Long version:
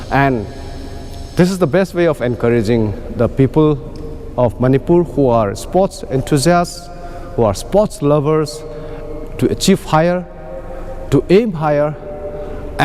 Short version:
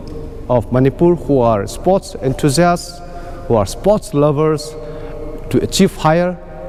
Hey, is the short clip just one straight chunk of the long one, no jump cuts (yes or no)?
yes